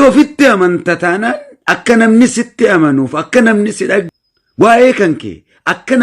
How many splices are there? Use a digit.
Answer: 1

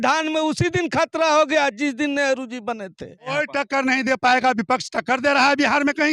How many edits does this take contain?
1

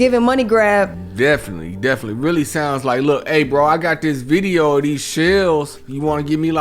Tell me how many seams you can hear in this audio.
1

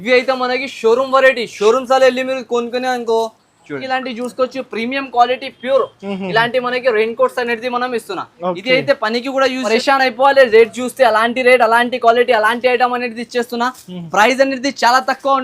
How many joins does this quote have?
2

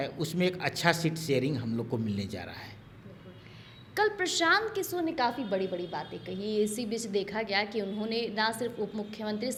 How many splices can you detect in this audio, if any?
0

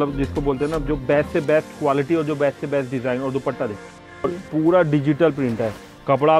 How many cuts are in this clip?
1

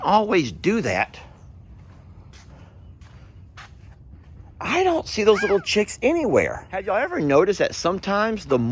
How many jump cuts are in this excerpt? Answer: 1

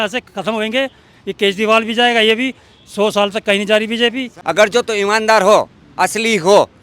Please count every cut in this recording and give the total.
1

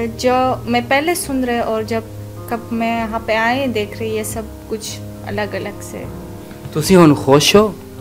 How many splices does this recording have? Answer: 0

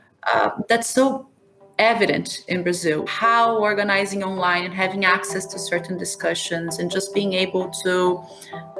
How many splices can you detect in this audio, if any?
1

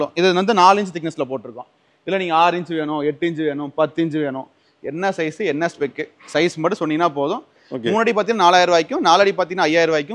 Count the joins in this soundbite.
1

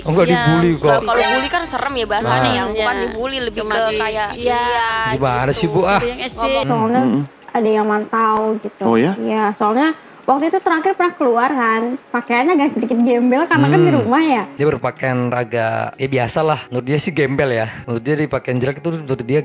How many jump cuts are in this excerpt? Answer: 2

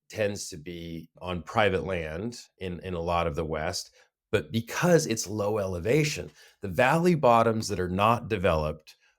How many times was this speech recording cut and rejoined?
1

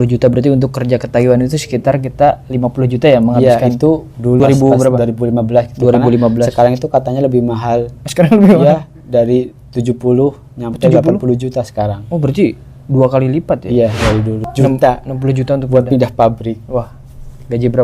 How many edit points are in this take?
2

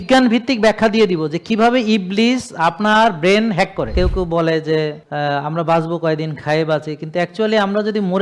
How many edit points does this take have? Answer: 1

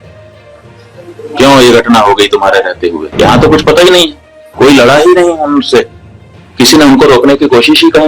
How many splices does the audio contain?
1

